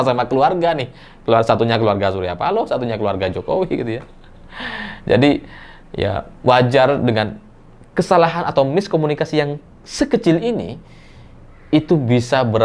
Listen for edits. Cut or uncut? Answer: uncut